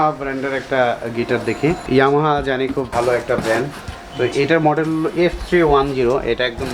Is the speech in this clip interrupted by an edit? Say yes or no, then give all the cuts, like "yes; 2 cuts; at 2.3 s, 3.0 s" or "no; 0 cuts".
yes; 2 cuts; at 1.8 s, 2.9 s